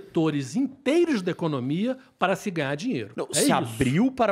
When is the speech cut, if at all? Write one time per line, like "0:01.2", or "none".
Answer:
0:03.1